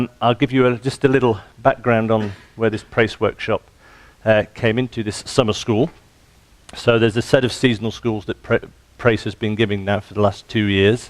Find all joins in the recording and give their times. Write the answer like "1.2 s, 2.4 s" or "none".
6.8 s